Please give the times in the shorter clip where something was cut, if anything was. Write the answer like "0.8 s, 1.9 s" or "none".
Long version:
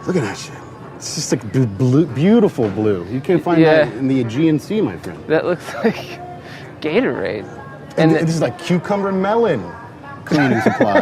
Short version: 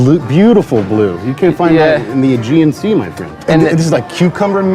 3.2 s